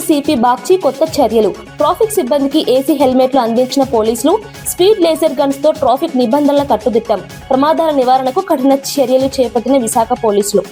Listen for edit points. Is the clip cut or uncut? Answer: uncut